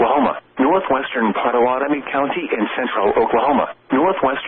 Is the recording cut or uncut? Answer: uncut